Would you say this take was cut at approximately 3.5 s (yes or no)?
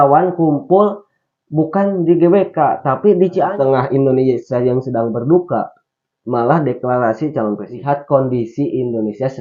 yes